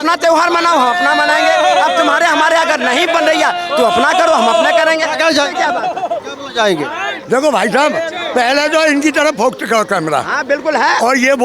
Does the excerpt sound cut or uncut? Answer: uncut